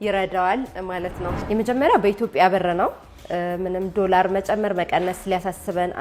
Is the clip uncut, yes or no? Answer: no